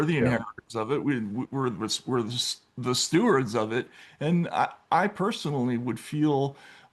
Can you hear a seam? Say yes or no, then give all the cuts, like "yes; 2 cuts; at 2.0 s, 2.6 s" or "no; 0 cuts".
no; 0 cuts